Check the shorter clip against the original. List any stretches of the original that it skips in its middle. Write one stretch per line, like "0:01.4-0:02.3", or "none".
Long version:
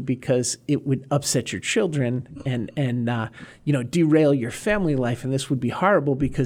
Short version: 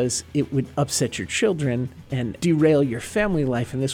0:02.7-0:03.9